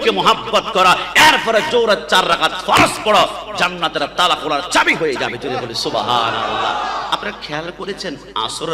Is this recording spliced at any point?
no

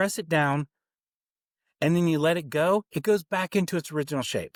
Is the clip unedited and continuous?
yes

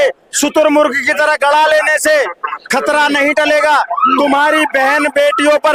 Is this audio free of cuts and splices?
yes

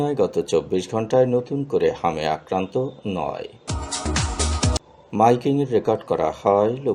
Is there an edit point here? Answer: no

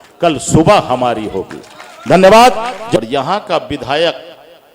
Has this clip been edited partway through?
yes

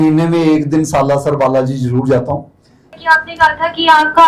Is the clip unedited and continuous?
no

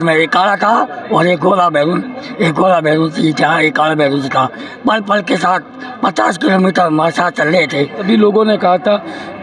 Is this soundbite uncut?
no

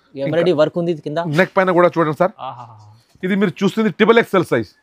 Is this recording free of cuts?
yes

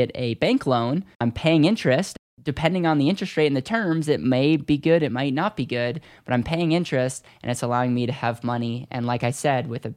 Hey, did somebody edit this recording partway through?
yes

